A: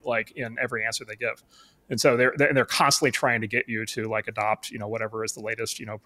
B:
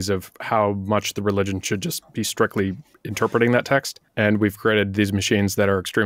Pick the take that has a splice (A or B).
B